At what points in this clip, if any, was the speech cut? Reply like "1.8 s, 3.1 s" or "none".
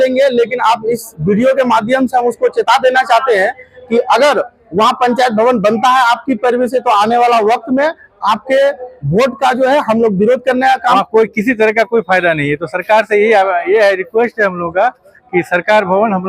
10.9 s

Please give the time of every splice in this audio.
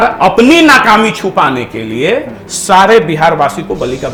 none

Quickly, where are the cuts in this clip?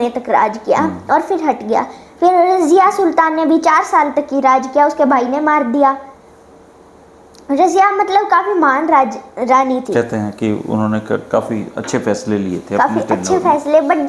none

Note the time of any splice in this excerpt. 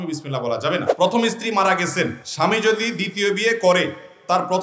0.9 s, 2.2 s

